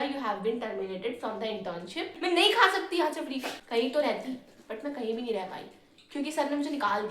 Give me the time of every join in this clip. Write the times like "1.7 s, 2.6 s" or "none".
2.1 s, 3.6 s